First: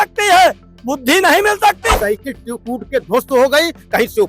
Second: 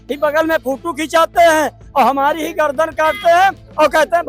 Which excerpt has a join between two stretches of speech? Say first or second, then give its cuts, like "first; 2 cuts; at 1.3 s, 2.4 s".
first; 1 cut; at 1.9 s